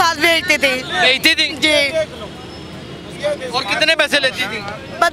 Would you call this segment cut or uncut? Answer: uncut